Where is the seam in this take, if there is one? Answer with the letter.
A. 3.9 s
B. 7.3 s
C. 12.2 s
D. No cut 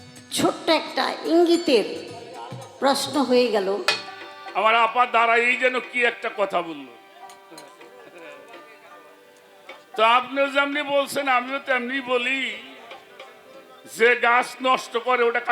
A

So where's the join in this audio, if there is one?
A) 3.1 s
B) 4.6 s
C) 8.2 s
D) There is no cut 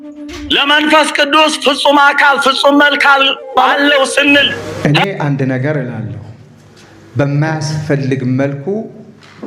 B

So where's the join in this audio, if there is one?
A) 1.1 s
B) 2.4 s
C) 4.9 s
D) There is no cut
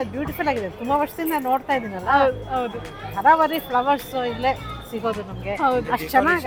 D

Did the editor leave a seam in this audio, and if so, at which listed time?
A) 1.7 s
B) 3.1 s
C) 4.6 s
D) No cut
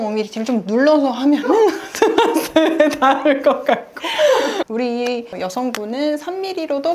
C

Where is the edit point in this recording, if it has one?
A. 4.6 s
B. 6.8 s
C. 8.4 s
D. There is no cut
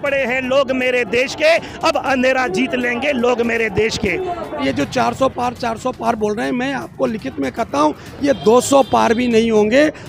A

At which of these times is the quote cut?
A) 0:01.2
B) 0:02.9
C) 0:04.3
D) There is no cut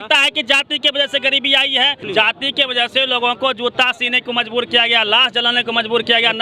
D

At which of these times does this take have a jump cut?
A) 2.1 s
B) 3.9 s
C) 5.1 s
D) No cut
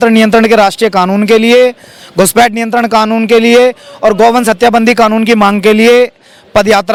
D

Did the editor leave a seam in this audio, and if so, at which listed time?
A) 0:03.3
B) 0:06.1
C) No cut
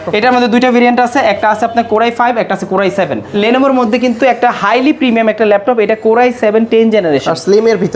A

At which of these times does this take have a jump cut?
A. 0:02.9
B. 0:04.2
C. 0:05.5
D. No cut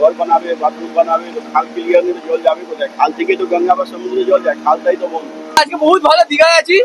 C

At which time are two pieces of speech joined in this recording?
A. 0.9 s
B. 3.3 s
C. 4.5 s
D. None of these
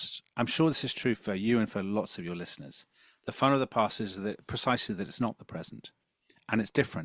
D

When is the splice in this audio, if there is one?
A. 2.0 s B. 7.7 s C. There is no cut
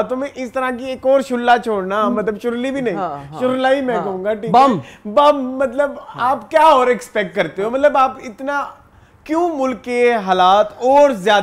C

